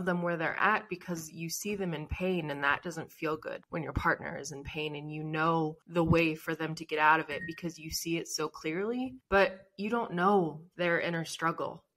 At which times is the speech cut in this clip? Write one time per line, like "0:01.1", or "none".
0:03.6
0:05.8
0:09.2